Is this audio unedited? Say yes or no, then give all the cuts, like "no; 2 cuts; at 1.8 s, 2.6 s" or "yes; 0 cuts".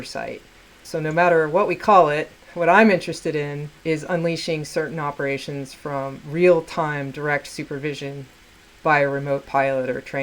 no; 1 cut; at 3.7 s